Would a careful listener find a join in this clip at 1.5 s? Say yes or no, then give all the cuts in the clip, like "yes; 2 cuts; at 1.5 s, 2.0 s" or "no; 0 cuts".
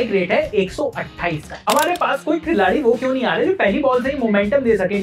yes; 1 cut; at 1.5 s